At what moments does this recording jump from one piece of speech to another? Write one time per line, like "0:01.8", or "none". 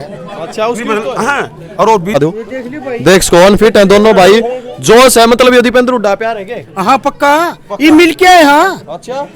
0:02.2